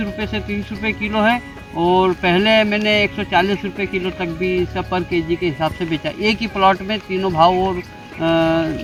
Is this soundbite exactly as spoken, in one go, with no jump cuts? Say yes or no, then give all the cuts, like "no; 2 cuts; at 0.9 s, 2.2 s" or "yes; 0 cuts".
yes; 0 cuts